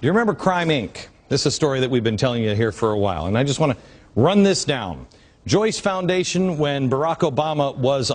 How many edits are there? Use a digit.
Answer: 0